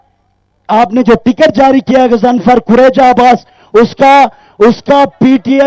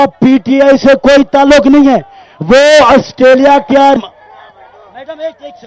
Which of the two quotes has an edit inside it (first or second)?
second